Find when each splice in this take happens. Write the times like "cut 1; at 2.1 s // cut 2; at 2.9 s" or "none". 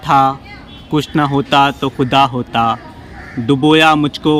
none

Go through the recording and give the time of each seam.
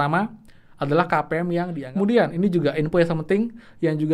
cut 1; at 1.8 s

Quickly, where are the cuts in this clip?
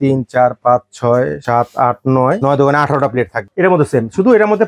cut 1; at 1.4 s // cut 2; at 2.4 s // cut 3; at 3.4 s

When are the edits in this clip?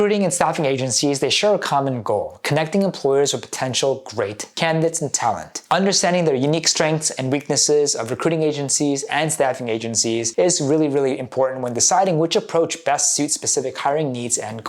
cut 1; at 5.5 s // cut 2; at 10.3 s

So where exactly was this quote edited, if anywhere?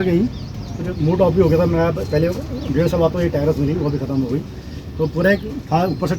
none

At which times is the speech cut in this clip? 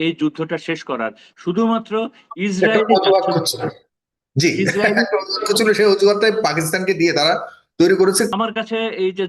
cut 1; at 8.3 s

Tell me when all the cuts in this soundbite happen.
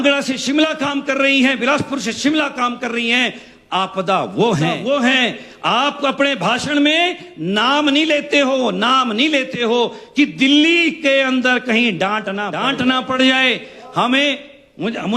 cut 1; at 4.8 s // cut 2; at 12.6 s

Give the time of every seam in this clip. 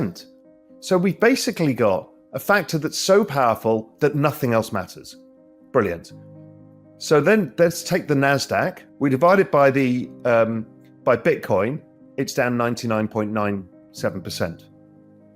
cut 1; at 8.8 s

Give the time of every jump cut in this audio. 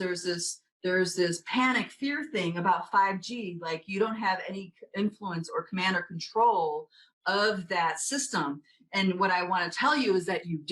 none

